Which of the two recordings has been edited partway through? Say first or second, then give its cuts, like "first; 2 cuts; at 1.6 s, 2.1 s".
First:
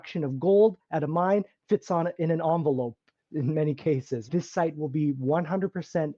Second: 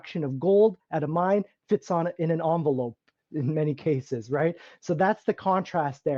first; 1 cut; at 4.2 s